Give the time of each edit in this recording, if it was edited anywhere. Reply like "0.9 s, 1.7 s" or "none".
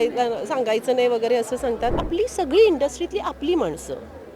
2.0 s